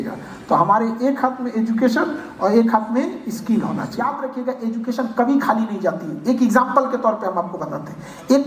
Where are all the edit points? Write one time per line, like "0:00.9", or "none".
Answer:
0:04.1